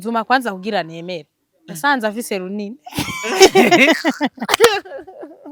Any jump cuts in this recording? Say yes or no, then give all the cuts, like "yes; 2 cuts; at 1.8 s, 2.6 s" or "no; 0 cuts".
no; 0 cuts